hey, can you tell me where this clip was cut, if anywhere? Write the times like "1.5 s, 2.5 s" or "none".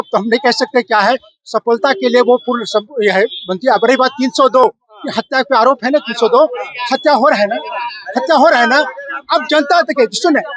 none